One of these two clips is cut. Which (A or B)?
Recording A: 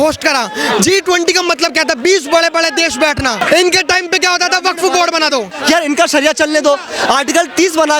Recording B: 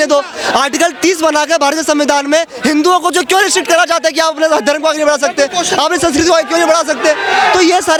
A